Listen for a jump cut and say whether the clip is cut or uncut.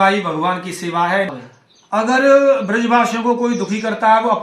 cut